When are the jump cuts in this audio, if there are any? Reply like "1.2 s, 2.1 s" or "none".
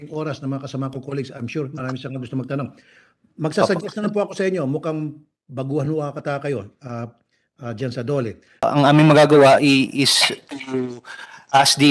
8.6 s